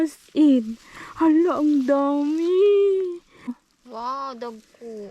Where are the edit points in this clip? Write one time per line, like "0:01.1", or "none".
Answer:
0:03.6